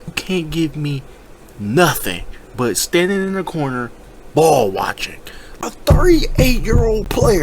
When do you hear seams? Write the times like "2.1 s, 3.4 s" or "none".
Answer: 5.6 s